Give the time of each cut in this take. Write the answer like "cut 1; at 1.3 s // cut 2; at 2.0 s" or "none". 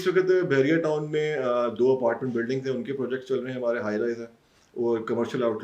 none

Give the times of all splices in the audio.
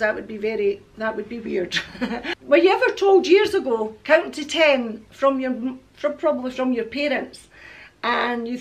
cut 1; at 2.3 s

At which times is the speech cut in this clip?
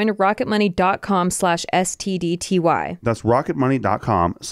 cut 1; at 2.9 s

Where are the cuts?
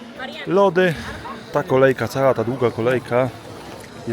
cut 1; at 1.4 s

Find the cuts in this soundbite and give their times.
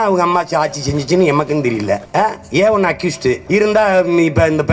cut 1; at 3.4 s

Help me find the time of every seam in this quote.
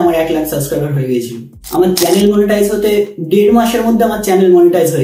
cut 1; at 1.6 s

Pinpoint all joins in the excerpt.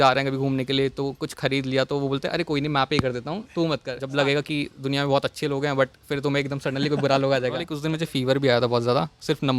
cut 1; at 4.0 s // cut 2; at 7.7 s

